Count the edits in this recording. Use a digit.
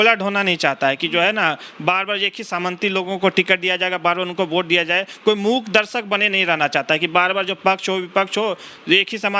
0